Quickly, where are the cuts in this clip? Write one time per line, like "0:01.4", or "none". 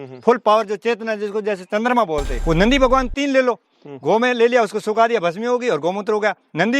0:02.3